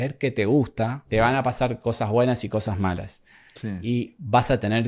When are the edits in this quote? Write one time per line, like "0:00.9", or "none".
0:01.0